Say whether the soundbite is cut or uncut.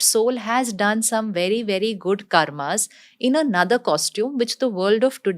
uncut